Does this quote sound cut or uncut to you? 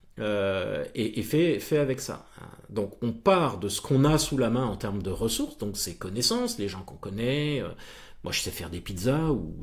uncut